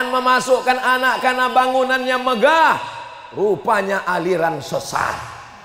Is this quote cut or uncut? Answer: uncut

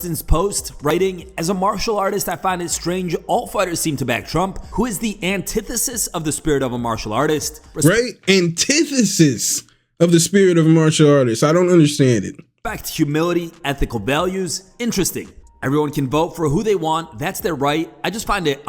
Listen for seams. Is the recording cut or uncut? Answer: cut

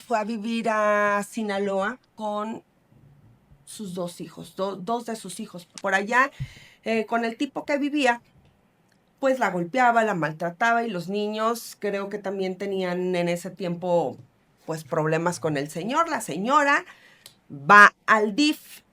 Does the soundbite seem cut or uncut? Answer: cut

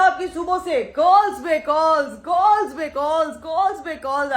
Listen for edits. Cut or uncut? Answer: uncut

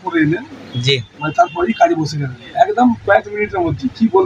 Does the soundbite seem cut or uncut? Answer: uncut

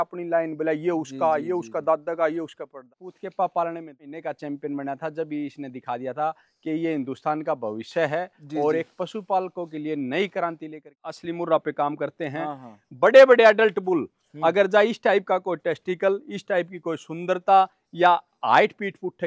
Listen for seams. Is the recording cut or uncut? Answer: cut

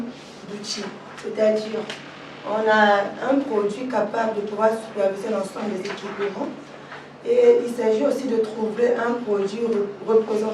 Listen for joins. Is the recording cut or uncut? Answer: uncut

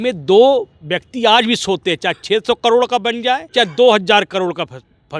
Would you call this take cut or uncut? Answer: cut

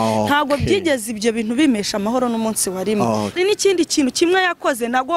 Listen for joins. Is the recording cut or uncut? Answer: cut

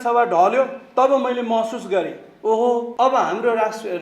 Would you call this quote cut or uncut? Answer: cut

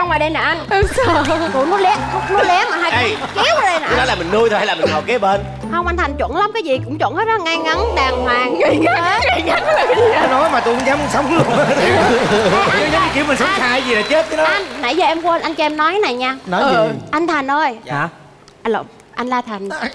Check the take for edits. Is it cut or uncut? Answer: uncut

